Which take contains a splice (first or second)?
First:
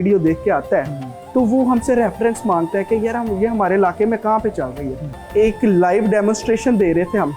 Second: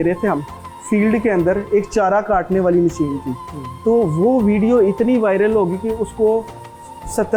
first